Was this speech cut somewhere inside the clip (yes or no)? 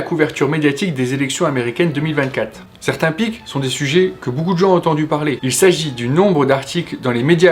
yes